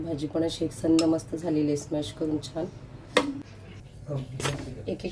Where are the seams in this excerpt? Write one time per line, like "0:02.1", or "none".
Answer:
0:03.4